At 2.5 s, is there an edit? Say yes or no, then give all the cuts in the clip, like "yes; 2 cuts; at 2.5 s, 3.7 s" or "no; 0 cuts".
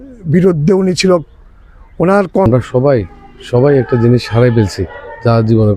yes; 1 cut; at 2.5 s